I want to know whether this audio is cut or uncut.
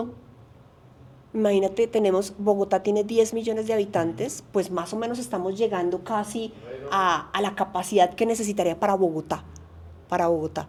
uncut